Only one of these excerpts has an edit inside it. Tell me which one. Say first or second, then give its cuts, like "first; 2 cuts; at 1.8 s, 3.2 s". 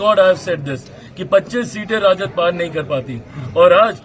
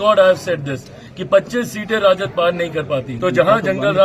second; 1 cut; at 3.1 s